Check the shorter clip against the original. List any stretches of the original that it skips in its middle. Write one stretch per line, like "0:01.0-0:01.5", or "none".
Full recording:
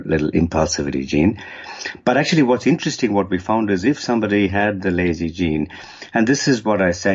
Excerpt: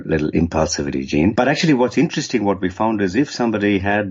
0:01.3-0:02.0